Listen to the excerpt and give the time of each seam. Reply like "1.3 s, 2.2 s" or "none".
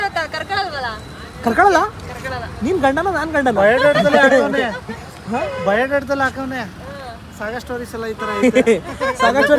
none

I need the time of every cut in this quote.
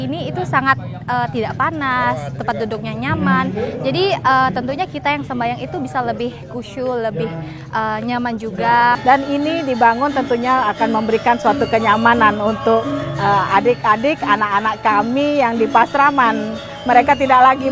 9.0 s

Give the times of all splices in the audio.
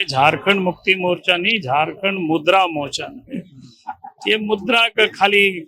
none

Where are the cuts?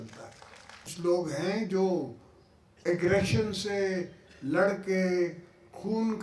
0.9 s

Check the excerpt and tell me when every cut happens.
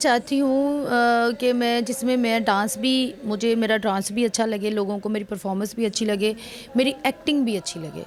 none

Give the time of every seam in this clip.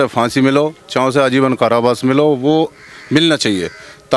none

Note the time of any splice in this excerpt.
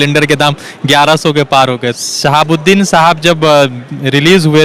1.9 s

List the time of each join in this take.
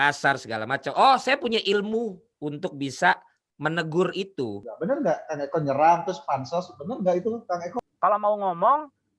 4.6 s, 7.7 s

